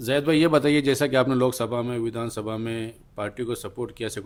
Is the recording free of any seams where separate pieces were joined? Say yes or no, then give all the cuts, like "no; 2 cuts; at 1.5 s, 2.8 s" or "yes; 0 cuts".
yes; 0 cuts